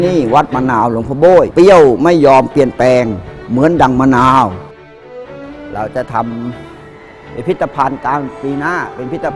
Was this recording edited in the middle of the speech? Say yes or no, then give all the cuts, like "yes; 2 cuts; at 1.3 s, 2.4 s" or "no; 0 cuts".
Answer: yes; 2 cuts; at 1.5 s, 5.2 s